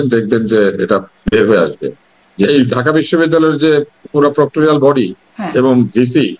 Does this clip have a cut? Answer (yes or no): yes